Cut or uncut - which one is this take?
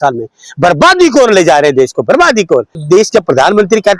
cut